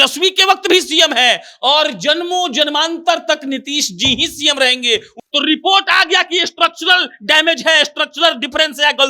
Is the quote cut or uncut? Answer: cut